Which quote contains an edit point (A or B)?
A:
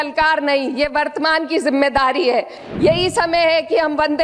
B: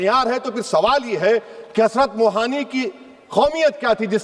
A